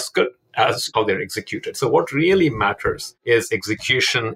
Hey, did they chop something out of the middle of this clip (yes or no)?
yes